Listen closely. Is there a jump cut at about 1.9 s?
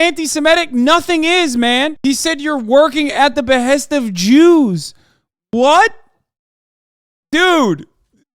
yes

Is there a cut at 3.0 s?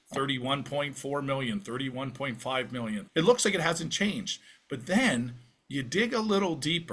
yes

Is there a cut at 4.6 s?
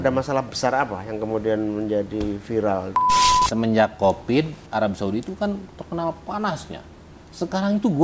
yes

